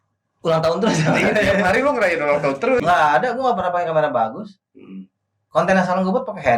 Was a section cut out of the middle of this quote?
yes; 1 cut; at 2.8 s

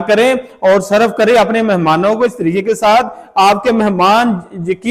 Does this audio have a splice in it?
no; 0 cuts

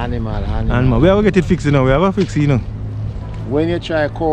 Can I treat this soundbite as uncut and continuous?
yes; 0 cuts

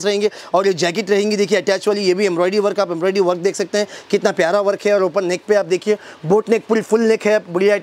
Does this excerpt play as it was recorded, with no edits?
yes; 0 cuts

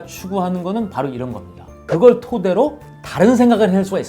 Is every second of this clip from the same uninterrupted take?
no; 1 cut; at 1.9 s

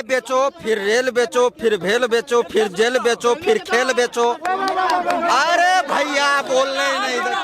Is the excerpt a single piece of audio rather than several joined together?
yes; 0 cuts

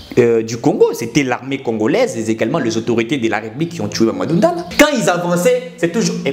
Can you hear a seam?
yes; 1 cut; at 4.7 s

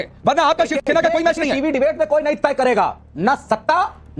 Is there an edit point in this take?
no; 0 cuts

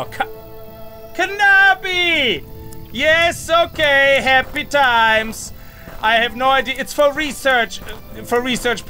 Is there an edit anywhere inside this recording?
no; 0 cuts

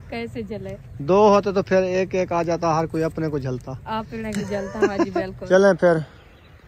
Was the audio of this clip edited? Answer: yes; 1 cut; at 5.4 s

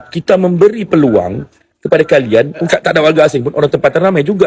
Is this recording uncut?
no; 1 cut; at 2.6 s

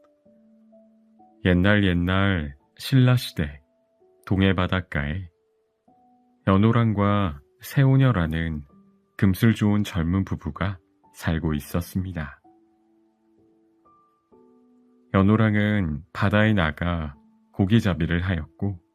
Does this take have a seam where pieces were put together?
yes; 1 cut; at 1.0 s

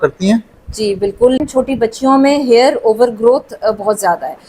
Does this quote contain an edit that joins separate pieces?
yes; 1 cut; at 1.4 s

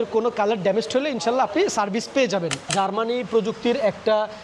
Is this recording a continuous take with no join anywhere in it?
no; 1 cut; at 2.7 s

